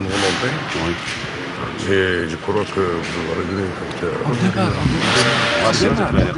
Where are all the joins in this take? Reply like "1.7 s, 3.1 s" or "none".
none